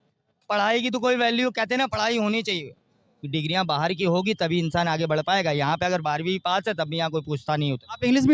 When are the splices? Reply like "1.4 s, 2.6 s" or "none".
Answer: none